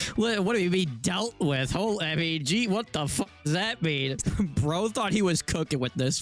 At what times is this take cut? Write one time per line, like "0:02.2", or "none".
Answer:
0:04.2

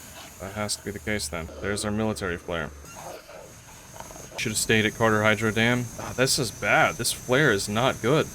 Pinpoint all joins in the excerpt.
0:01.5
0:02.8
0:04.3
0:06.0

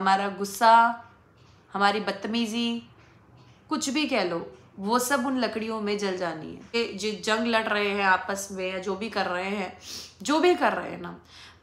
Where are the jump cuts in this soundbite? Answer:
0:06.8

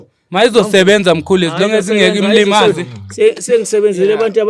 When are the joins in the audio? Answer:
none

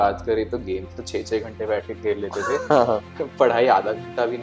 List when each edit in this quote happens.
none

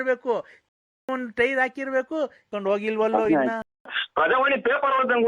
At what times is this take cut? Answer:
0:02.5

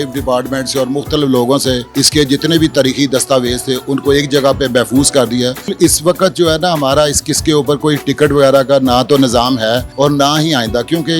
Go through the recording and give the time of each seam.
0:01.8
0:05.7
0:09.9

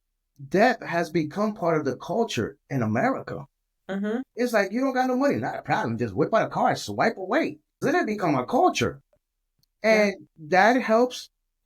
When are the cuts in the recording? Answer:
0:07.8

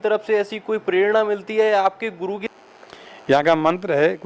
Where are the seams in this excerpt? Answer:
0:02.4

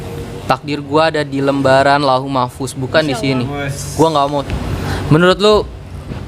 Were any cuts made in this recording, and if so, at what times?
0:04.1

